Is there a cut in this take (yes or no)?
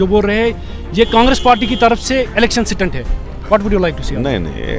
no